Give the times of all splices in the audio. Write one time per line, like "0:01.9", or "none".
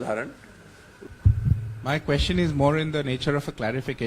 0:01.1